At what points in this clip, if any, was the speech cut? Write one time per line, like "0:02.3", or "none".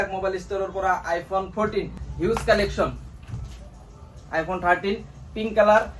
0:02.0